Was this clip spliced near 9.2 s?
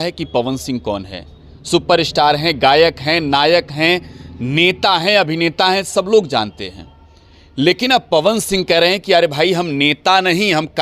no; 0 cuts

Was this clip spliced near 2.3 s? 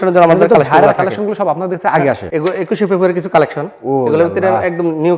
yes; 1 cut; at 2.3 s

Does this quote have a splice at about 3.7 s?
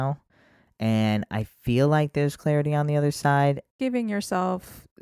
yes; 1 cut; at 3.7 s

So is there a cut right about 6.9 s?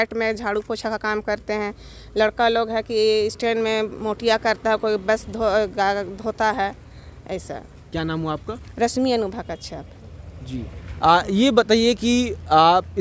no; 0 cuts

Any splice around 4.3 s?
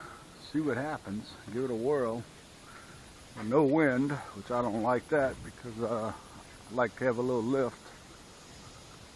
yes; 1 cut; at 4.3 s

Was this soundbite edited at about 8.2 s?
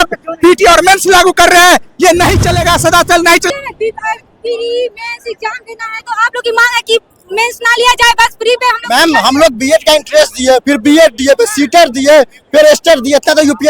no; 1 cut; at 3.5 s

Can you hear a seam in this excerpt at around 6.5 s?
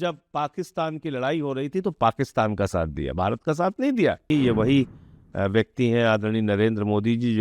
no; 1 cut; at 4.3 s

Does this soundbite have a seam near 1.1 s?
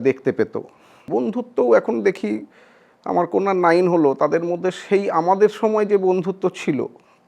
yes; 1 cut; at 1.1 s

